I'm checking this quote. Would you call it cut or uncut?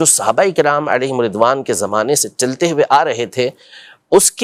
uncut